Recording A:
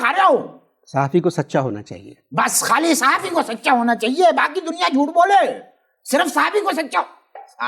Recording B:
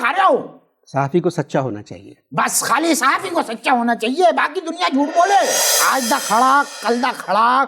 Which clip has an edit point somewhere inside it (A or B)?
B